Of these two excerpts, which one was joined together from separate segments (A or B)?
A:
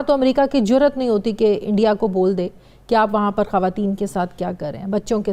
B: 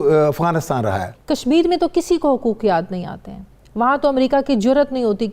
B